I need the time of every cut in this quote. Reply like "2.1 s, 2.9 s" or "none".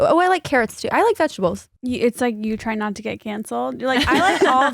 1.7 s